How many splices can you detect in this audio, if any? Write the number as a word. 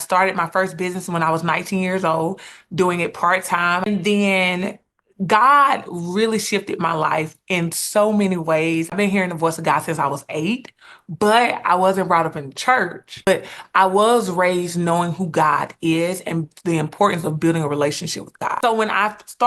four